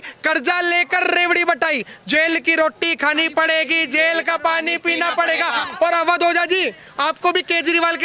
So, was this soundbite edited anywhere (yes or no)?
no